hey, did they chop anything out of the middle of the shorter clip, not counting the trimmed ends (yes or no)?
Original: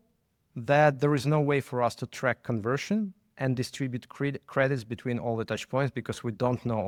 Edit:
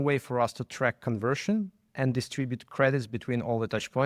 yes